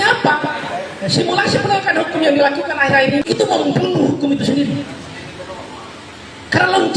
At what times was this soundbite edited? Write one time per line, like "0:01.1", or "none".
0:03.2